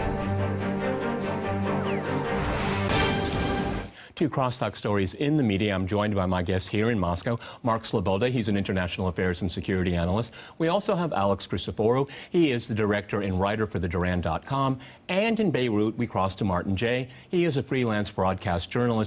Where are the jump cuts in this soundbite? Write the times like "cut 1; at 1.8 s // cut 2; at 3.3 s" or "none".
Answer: cut 1; at 10.1 s